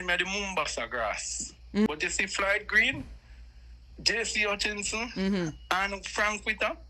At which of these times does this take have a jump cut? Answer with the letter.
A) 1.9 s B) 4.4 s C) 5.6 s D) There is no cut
A